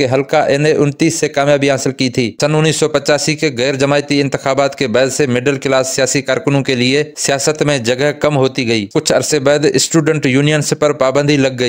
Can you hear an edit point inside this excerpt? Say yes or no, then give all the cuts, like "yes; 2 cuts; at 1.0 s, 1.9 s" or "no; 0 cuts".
yes; 2 cuts; at 2.3 s, 8.9 s